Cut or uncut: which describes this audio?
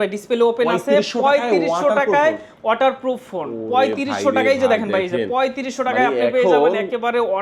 uncut